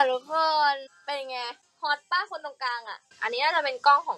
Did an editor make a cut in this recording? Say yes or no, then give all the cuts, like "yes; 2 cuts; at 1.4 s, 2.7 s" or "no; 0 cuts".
yes; 1 cut; at 3.1 s